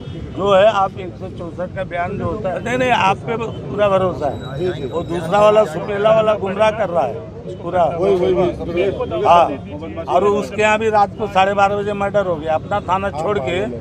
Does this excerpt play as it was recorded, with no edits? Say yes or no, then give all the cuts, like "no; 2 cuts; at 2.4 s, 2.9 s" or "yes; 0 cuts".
no; 1 cut; at 2.6 s